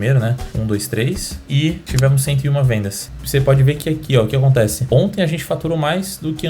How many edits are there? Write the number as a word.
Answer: one